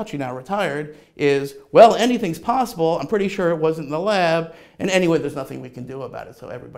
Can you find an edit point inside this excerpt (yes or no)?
no